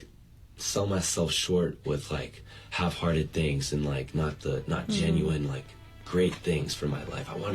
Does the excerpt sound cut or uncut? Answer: uncut